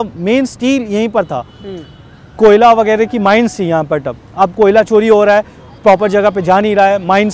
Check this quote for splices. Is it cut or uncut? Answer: uncut